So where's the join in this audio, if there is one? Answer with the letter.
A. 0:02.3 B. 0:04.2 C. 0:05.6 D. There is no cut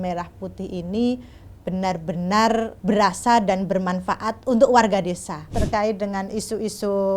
C